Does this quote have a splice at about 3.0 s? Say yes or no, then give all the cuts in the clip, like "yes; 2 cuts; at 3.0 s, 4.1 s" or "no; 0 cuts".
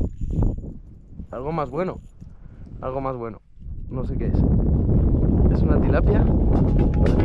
no; 0 cuts